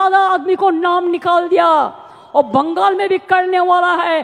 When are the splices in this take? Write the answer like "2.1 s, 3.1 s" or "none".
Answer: none